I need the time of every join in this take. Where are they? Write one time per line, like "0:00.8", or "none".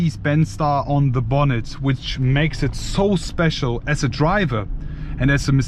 none